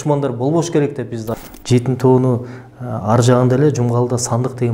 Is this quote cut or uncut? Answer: cut